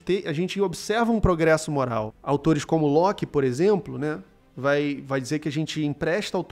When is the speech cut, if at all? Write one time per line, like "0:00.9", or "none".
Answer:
0:02.1